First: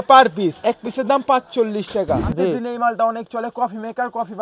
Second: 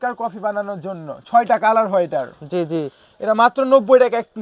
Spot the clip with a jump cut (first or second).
first